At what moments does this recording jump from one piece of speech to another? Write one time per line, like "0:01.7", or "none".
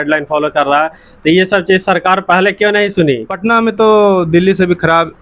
0:03.3

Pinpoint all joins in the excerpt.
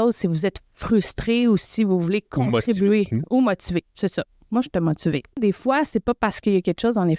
0:05.4

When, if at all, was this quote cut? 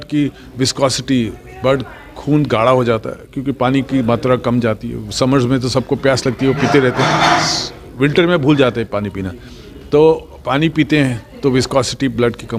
none

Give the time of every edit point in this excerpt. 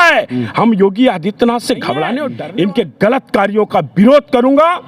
0:02.3

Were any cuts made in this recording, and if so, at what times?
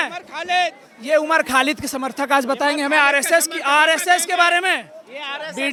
none

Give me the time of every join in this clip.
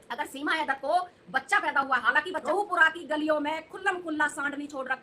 0:02.4

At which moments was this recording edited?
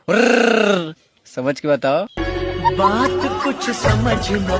none

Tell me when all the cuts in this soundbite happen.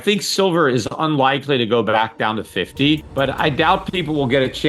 0:03.1

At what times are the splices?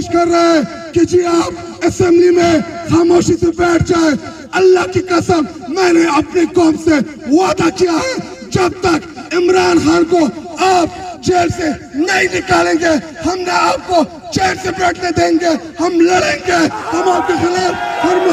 none

